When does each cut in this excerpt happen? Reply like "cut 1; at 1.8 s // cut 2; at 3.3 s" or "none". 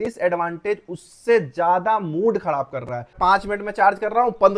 cut 1; at 3.1 s